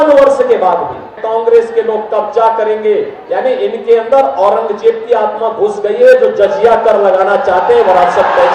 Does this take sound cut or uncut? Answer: cut